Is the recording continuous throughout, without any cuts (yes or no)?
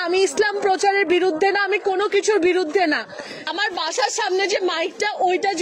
no